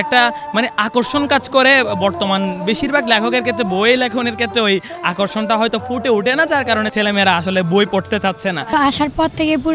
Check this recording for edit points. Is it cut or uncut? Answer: cut